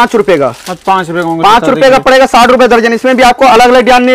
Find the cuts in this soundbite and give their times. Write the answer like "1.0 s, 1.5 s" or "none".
none